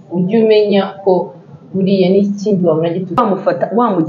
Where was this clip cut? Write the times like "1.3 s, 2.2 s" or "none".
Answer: 3.2 s